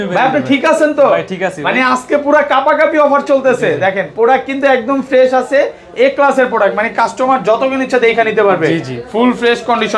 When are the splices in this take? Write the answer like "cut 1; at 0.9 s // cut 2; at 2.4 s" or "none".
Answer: none

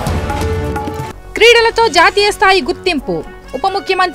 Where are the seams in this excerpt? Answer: cut 1; at 0.9 s

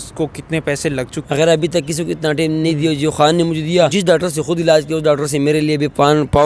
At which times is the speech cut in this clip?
cut 1; at 1.2 s // cut 2; at 3.9 s

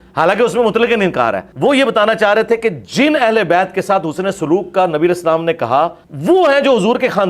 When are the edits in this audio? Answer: cut 1; at 1.5 s // cut 2; at 6.1 s

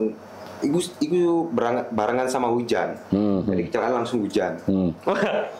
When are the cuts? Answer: none

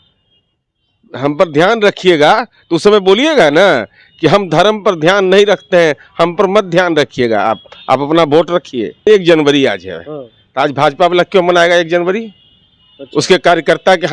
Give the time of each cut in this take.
cut 1; at 9.1 s

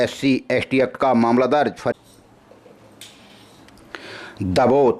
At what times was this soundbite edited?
cut 1; at 1.9 s

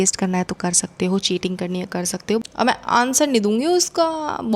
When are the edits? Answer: cut 1; at 2.4 s

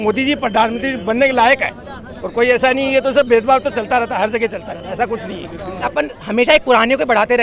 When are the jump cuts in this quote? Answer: cut 1; at 5.9 s

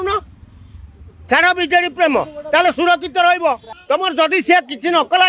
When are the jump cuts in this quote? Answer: cut 1; at 3.7 s

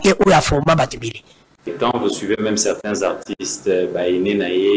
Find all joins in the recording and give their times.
cut 1; at 1.7 s

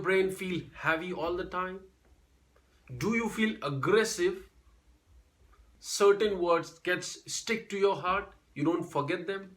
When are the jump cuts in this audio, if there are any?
cut 1; at 5.8 s

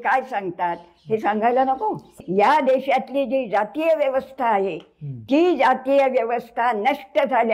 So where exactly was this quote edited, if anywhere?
cut 1; at 2.2 s

